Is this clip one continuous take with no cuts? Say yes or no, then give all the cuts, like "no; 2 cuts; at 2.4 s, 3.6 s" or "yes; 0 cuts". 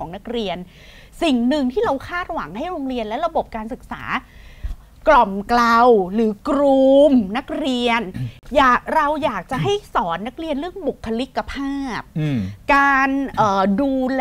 yes; 0 cuts